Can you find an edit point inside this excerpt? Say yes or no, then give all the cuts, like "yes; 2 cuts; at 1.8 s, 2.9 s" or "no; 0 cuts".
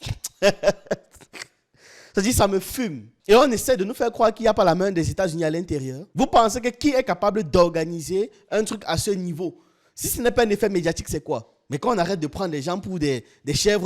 no; 0 cuts